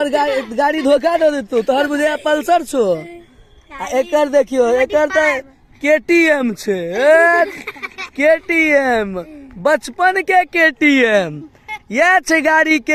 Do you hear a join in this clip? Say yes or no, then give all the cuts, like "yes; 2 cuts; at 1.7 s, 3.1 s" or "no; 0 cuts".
no; 0 cuts